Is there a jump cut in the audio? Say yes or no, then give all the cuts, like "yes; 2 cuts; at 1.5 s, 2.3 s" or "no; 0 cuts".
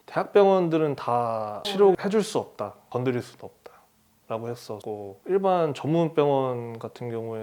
yes; 2 cuts; at 1.6 s, 2.8 s